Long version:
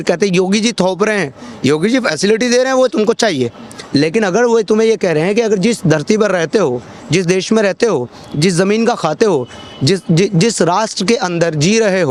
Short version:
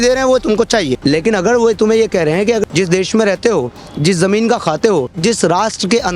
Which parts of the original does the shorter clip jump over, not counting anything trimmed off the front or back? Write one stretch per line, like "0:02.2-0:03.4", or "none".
0:03.4-0:03.8
0:05.5-0:07.0
0:09.5-0:10.3